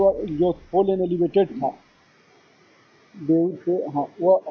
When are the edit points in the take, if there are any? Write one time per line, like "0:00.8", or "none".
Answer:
none